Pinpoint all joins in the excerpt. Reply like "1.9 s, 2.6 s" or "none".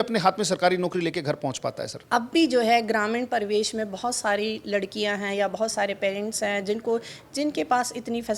1.9 s